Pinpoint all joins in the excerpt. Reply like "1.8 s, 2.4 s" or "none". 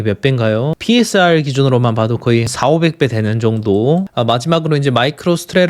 2.5 s, 4.1 s